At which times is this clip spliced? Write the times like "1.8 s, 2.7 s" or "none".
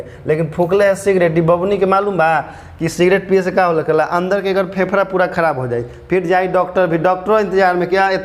none